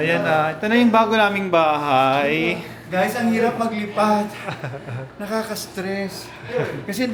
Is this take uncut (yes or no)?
yes